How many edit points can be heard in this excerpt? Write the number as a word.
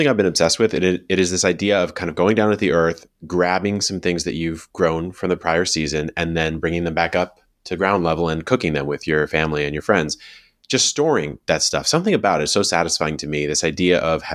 zero